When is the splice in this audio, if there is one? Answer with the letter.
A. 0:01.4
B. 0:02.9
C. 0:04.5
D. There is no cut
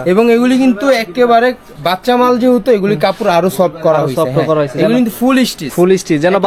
D